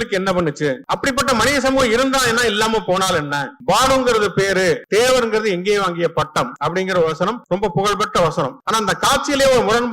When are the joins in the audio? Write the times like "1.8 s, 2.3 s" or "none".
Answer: 0.8 s, 3.5 s, 4.8 s, 6.5 s, 7.4 s, 8.6 s